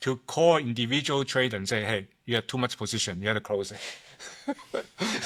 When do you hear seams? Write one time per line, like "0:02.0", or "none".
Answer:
none